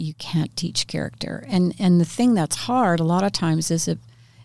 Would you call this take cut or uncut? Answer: uncut